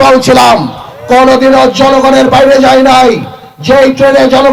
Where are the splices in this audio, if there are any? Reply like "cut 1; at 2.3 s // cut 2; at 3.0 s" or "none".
none